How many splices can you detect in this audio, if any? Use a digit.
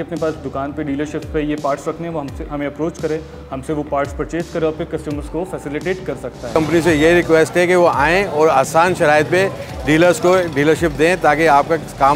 1